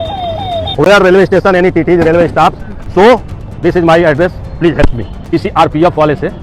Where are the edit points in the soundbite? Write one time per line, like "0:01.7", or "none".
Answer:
0:05.1

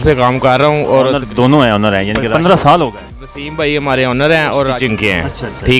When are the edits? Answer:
0:01.2
0:02.3
0:04.7

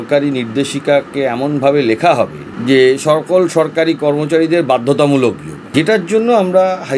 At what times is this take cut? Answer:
0:02.5
0:05.5

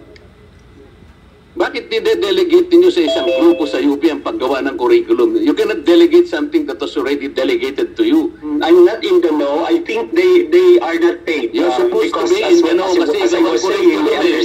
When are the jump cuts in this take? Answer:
0:08.5

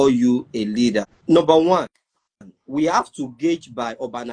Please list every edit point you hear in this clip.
0:01.1

